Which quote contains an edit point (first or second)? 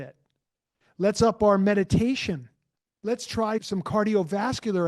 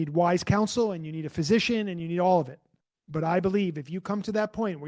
first